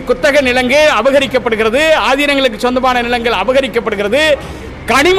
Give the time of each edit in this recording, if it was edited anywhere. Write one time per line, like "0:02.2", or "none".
none